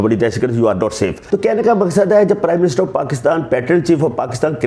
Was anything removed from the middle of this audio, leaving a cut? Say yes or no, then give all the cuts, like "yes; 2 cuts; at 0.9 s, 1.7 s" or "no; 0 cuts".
yes; 1 cut; at 1.2 s